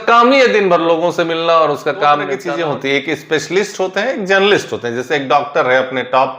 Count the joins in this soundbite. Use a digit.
1